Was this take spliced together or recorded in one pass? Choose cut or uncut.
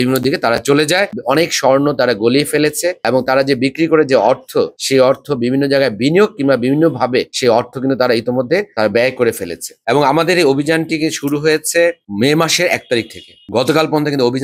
cut